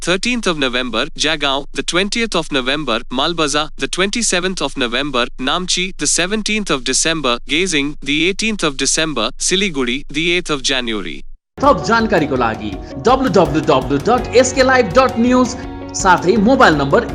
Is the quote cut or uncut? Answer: uncut